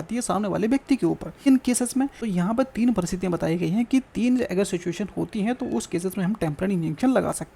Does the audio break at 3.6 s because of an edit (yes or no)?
no